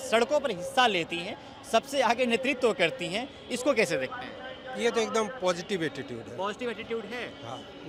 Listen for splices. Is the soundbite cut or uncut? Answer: uncut